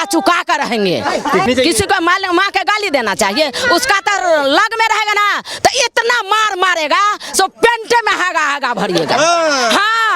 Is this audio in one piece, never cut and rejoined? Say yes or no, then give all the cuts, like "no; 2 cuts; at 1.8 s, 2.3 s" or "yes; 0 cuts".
no; 1 cut; at 1.5 s